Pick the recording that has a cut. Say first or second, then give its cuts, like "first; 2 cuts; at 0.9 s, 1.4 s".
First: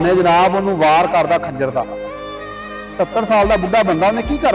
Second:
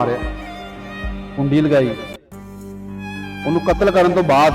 second; 2 cuts; at 2.0 s, 3.4 s